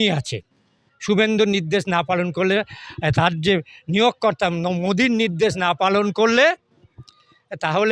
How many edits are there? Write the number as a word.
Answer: zero